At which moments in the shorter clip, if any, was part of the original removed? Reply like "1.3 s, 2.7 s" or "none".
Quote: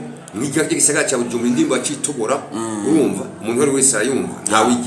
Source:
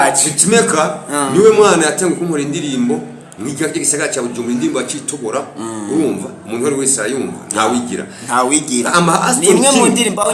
none